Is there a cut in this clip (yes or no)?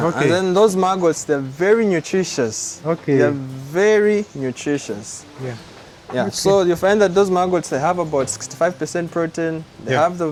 no